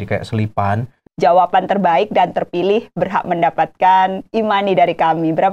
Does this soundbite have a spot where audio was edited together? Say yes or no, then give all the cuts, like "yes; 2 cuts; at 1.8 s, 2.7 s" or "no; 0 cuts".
yes; 1 cut; at 1.0 s